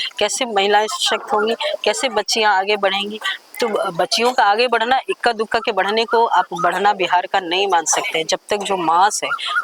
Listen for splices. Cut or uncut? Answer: uncut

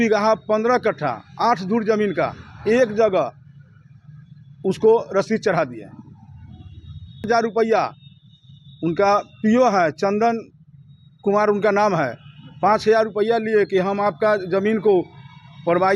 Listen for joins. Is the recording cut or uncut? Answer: cut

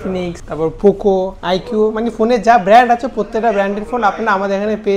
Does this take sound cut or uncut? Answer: uncut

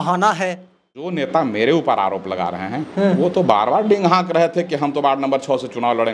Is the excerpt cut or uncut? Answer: cut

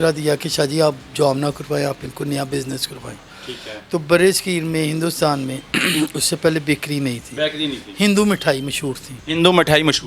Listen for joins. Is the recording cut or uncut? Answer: uncut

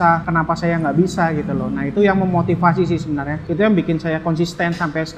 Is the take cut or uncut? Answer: uncut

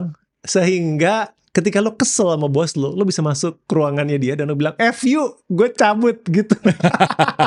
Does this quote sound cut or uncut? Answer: uncut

